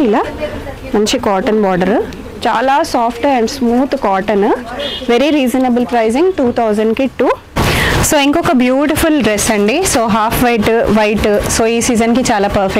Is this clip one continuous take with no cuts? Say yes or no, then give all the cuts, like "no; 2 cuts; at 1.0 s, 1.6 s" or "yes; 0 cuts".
no; 1 cut; at 7.5 s